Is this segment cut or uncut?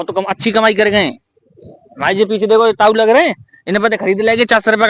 uncut